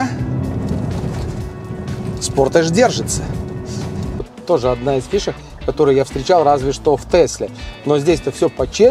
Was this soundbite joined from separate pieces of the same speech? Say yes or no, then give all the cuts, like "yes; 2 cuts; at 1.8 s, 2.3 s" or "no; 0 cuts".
yes; 1 cut; at 4.3 s